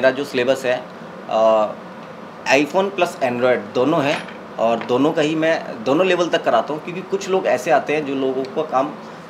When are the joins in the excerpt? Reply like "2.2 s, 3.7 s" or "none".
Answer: none